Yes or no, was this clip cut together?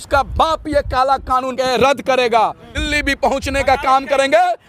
yes